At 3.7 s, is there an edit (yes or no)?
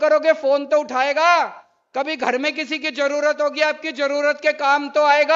no